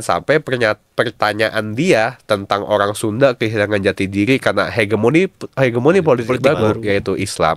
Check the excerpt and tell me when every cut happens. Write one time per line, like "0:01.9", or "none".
none